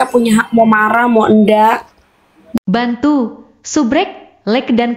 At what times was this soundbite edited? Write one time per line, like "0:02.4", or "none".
0:02.6